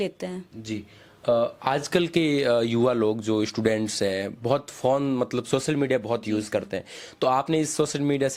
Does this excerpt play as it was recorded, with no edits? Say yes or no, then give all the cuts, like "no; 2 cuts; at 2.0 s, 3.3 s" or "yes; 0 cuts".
yes; 0 cuts